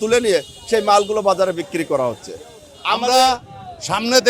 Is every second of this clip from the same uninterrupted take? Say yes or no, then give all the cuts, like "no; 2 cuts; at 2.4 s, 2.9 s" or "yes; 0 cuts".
no; 1 cut; at 2.9 s